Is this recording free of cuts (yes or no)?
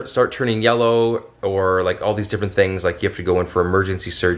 yes